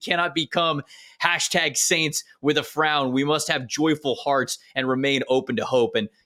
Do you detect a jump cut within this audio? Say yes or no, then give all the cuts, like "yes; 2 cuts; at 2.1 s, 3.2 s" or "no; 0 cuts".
no; 0 cuts